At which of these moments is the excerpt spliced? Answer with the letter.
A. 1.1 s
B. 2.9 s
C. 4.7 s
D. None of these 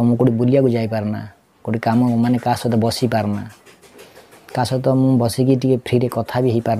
D